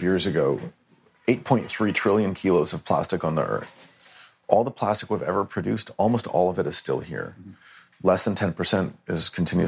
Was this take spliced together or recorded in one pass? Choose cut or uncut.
uncut